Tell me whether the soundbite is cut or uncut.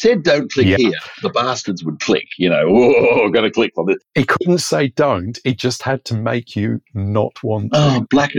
cut